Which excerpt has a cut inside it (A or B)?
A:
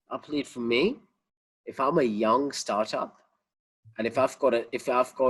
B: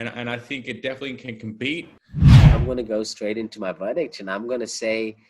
B